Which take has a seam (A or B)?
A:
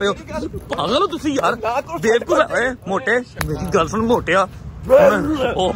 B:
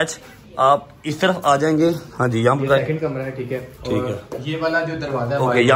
A